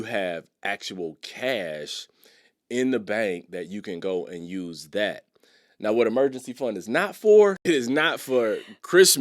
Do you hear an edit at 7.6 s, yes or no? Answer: yes